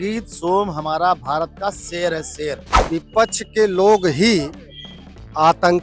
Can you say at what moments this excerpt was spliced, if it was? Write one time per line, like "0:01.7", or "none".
0:02.7